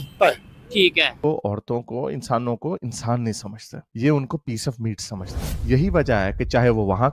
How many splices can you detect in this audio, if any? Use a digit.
1